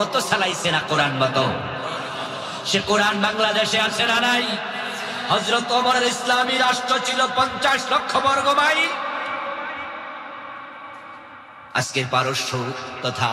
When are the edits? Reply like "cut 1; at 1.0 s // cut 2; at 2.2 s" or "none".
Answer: none